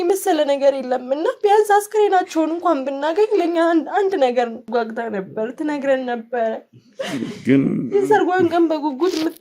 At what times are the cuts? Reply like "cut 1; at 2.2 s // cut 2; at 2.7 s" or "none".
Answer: cut 1; at 4.6 s